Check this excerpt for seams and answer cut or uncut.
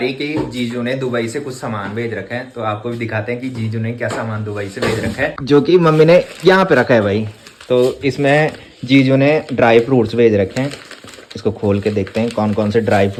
uncut